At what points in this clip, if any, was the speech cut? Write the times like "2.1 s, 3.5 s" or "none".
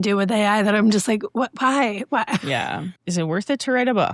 2.9 s